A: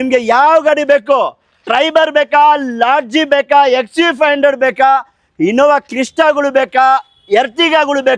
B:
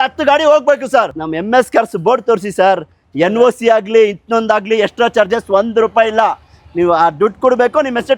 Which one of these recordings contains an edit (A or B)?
B